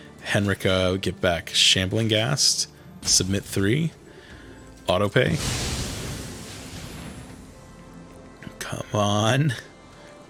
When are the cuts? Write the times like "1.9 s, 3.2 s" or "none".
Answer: none